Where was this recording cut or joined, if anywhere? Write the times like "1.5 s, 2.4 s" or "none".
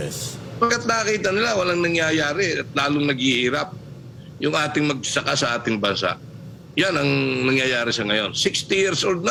none